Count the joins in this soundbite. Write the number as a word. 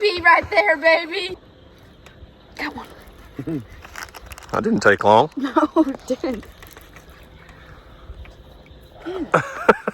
one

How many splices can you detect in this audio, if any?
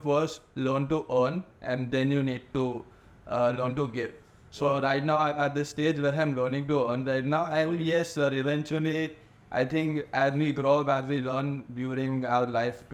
zero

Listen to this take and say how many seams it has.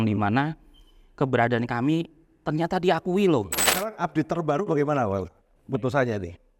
one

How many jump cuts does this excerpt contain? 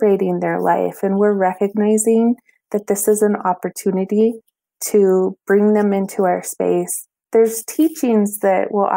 zero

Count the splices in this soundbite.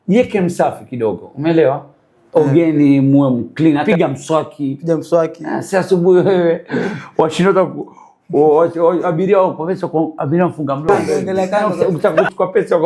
two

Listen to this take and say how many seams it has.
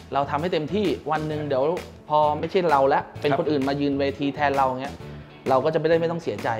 one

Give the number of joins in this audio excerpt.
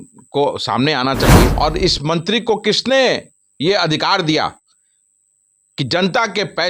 one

